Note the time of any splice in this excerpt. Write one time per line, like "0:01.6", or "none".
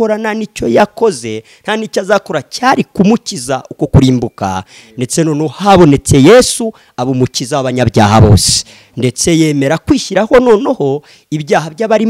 none